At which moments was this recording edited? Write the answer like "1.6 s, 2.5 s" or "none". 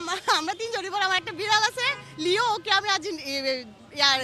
none